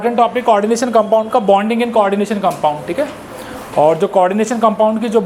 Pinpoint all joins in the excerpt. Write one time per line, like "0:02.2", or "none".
none